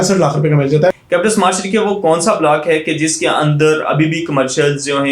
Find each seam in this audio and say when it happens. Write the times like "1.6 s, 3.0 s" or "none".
0.9 s